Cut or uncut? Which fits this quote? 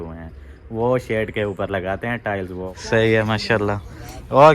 cut